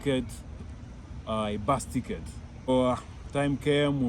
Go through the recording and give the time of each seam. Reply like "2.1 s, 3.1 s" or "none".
2.7 s